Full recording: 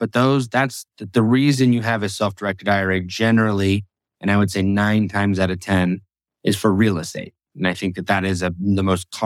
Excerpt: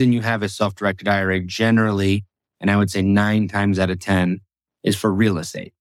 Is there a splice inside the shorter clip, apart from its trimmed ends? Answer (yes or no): no